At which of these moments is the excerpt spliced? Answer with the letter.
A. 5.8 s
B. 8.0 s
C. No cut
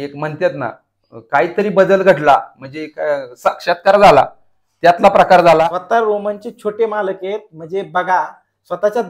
A